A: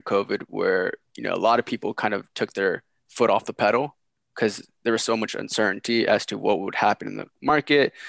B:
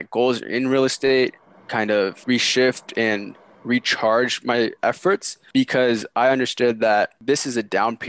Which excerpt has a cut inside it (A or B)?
B